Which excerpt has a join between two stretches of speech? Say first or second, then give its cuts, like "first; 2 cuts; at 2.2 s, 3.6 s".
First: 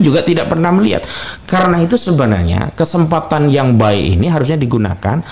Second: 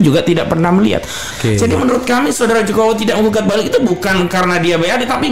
second; 1 cut; at 1.3 s